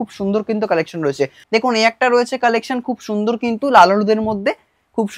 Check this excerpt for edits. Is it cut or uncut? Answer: cut